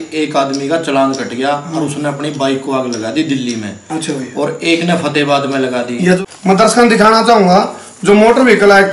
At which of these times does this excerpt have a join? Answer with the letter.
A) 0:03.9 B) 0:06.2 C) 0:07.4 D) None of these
B